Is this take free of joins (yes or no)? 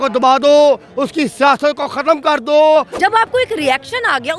no